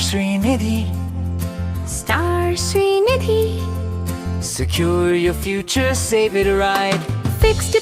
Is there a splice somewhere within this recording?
no; 0 cuts

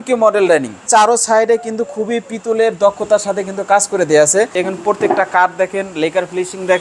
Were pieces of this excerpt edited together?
yes; 2 cuts; at 0.8 s, 4.6 s

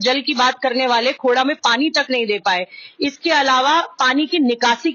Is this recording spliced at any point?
no; 0 cuts

